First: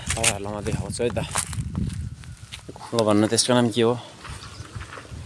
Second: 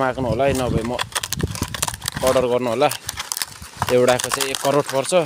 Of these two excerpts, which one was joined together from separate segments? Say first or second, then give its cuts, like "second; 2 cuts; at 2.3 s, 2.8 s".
first; 1 cut; at 2.7 s